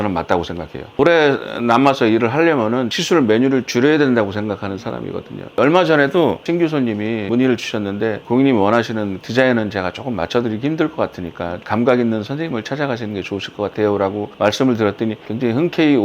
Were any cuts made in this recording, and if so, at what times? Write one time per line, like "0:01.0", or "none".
0:00.9
0:03.0
0:08.2